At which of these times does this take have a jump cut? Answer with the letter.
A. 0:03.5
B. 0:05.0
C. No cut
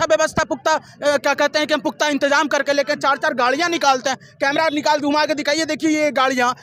C